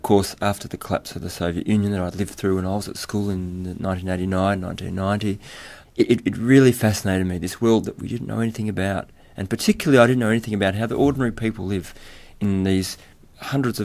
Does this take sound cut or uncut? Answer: uncut